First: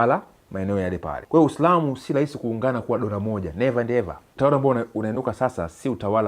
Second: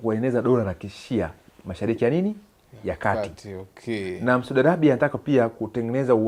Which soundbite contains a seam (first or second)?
first